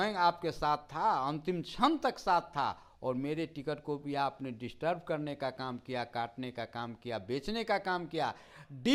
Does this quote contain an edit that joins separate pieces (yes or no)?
no